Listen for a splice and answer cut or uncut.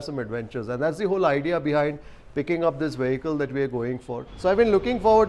cut